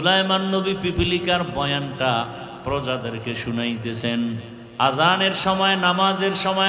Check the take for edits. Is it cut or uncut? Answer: cut